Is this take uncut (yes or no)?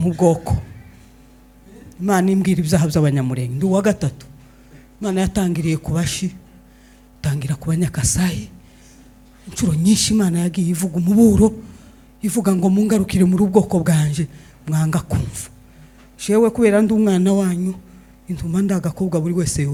yes